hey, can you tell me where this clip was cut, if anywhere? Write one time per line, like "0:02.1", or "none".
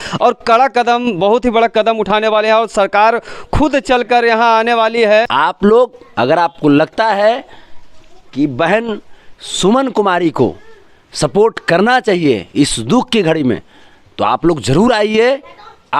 0:05.3